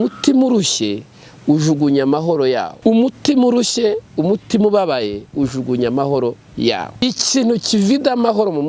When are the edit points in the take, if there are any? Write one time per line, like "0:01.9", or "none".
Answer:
0:02.7
0:07.0